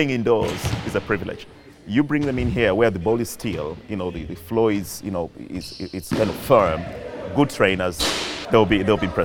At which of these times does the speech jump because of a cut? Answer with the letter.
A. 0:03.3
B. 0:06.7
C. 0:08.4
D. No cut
C